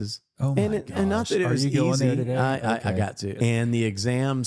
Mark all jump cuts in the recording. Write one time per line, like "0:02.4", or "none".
0:03.3

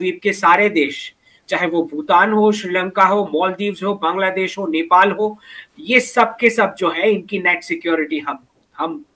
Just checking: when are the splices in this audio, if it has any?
none

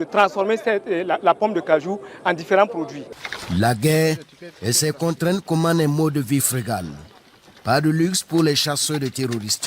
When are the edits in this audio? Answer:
0:03.2

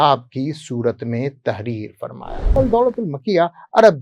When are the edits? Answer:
0:02.6

